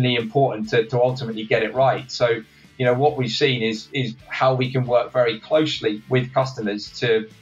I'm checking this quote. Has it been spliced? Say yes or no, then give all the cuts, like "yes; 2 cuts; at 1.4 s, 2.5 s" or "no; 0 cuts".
no; 0 cuts